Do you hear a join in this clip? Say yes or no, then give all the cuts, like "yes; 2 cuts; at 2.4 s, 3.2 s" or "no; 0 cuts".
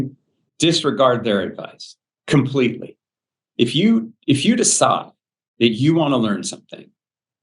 no; 0 cuts